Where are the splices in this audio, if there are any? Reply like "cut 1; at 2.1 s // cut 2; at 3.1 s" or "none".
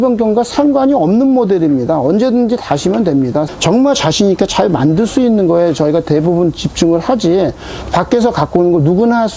cut 1; at 3.5 s